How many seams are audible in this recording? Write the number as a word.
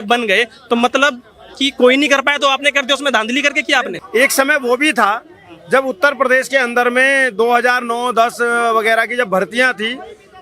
one